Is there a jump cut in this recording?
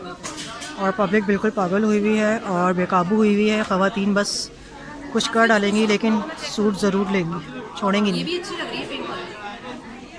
no; 0 cuts

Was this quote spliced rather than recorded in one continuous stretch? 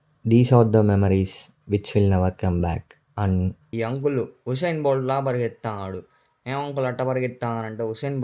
yes; 1 cut; at 3.6 s

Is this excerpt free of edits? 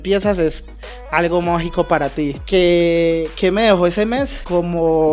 yes; 0 cuts

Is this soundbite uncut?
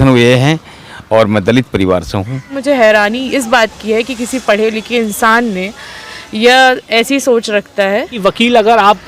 no; 2 cuts; at 2.5 s, 8.1 s

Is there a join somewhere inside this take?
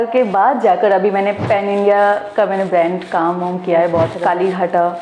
yes; 2 cuts; at 1.4 s, 4.2 s

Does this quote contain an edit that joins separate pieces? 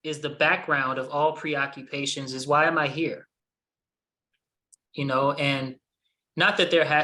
no; 0 cuts

